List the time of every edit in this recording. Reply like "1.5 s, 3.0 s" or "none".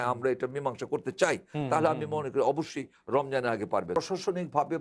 3.9 s